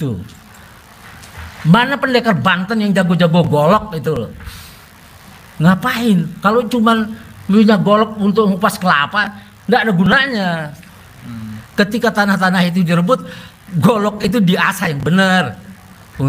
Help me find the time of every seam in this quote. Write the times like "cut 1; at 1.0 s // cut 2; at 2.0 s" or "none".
none

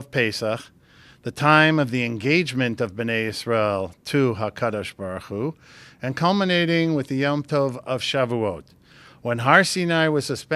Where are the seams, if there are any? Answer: none

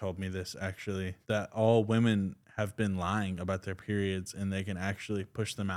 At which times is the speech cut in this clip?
cut 1; at 1.2 s

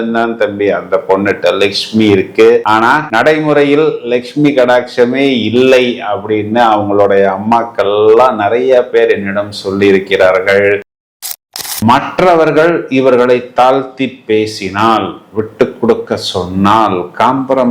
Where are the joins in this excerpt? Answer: cut 1; at 11.2 s

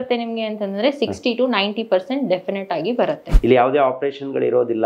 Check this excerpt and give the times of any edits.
cut 1; at 3.3 s

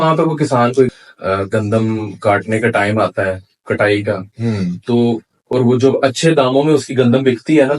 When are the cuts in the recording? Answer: cut 1; at 0.9 s

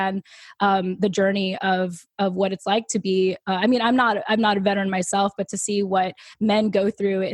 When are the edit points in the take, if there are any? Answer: none

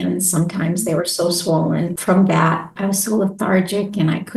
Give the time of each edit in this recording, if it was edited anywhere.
cut 1; at 2.7 s

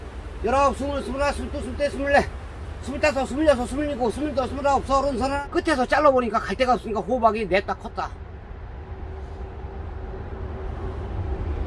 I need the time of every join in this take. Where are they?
cut 1; at 5.4 s

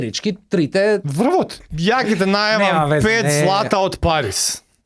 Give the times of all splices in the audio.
cut 1; at 1.6 s

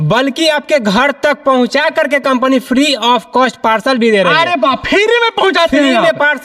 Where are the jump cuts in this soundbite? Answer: none

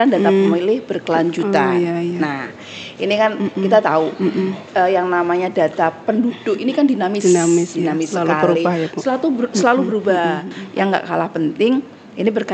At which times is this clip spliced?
cut 1; at 10.6 s

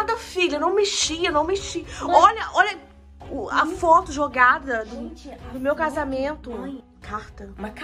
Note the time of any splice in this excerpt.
cut 1; at 6.9 s

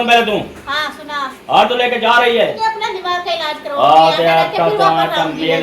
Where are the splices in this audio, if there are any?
cut 1; at 2.6 s

